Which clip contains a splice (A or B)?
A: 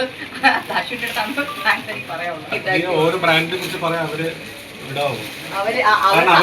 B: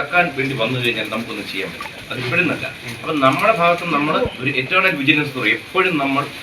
A